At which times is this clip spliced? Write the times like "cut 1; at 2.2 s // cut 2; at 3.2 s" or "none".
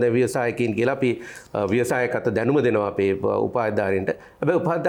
none